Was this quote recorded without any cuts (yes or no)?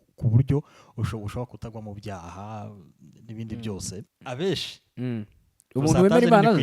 no